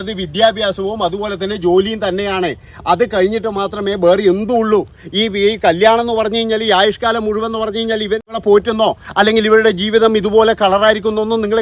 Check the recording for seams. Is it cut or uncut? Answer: cut